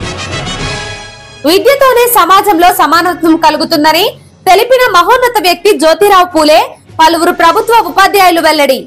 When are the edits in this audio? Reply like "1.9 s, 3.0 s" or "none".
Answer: 1.2 s